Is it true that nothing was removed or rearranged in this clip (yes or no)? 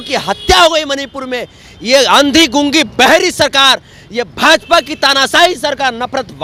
yes